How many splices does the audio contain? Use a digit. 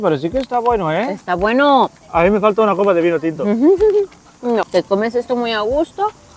2